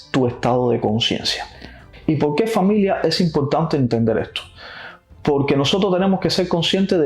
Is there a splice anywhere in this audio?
no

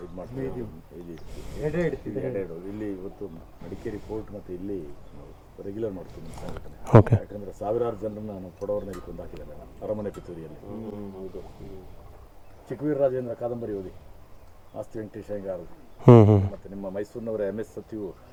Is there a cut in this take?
no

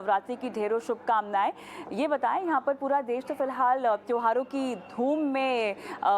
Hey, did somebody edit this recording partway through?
yes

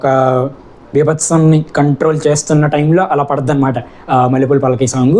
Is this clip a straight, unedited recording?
yes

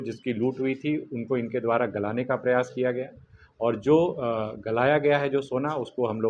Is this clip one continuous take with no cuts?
yes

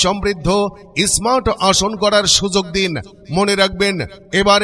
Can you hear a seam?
no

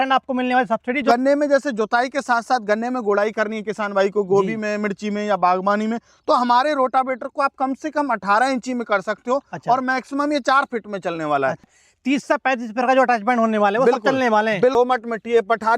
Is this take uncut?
no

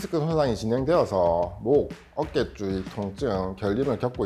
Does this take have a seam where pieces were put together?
no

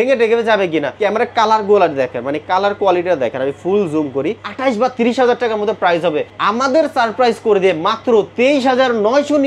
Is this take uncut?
no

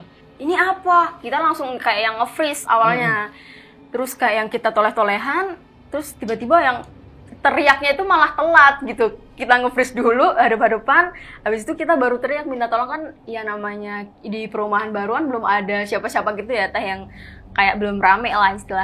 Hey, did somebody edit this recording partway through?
no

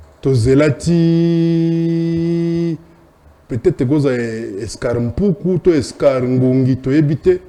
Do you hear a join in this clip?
no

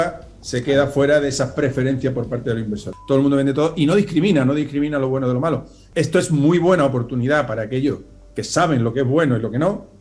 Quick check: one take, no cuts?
no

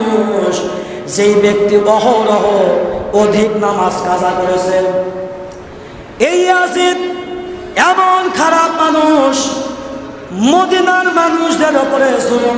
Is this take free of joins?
yes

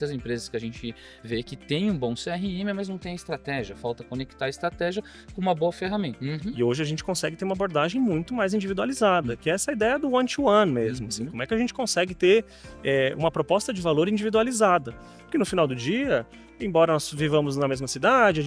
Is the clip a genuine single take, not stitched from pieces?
no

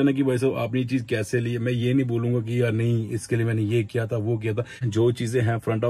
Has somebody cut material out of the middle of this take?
yes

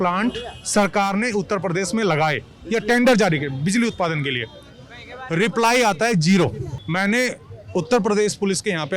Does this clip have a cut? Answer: yes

